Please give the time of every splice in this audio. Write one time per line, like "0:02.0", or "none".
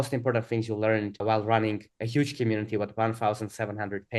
0:01.2